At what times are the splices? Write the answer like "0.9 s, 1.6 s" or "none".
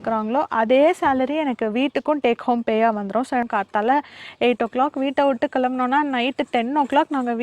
3.5 s